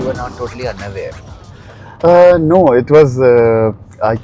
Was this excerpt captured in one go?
yes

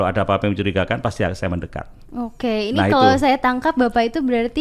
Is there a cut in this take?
no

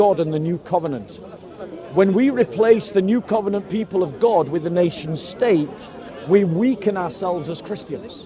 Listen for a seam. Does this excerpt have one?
no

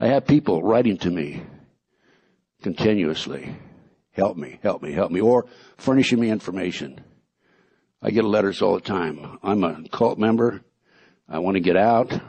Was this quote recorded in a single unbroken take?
yes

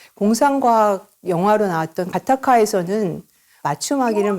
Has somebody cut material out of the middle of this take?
yes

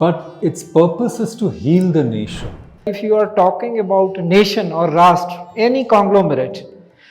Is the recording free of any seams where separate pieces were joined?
no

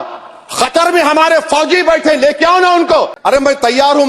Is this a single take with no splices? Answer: no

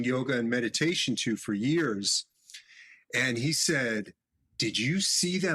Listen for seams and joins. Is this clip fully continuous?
yes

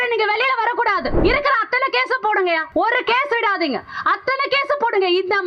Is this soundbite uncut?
no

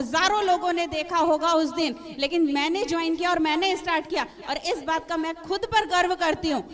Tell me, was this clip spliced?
no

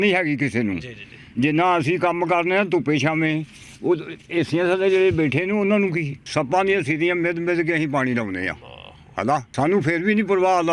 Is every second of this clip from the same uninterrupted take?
no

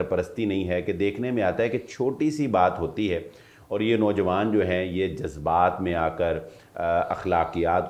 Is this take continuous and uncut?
yes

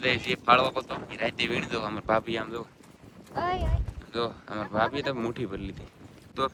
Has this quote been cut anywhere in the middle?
no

